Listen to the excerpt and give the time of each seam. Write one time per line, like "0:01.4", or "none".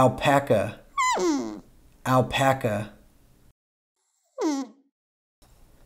none